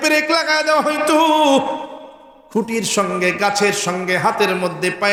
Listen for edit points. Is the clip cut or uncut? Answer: uncut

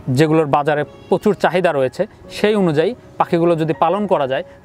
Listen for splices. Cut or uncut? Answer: uncut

